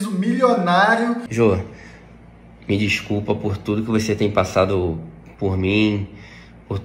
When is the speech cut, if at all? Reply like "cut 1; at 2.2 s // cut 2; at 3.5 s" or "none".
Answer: cut 1; at 1.3 s